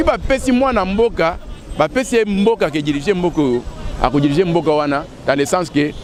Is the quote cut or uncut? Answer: uncut